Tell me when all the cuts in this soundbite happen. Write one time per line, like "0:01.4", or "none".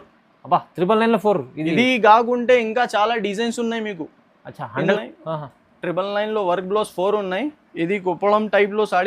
0:04.9